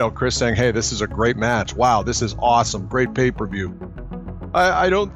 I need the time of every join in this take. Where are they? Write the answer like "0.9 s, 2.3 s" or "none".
3.9 s